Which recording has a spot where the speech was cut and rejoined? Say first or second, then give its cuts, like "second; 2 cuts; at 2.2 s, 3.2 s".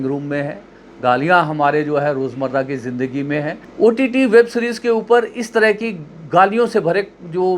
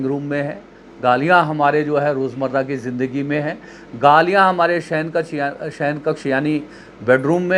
first; 1 cut; at 3.6 s